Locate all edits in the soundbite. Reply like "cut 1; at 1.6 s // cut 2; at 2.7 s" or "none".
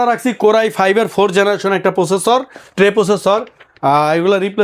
none